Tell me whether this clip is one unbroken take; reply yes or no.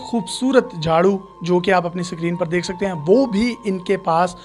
yes